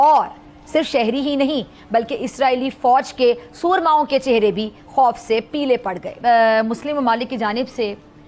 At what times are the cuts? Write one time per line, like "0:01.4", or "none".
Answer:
0:06.2